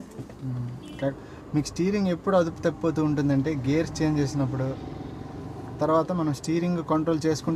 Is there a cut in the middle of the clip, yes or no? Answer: yes